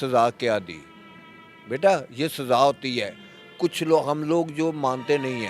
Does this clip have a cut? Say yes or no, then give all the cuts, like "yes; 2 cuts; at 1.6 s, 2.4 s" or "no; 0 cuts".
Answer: no; 0 cuts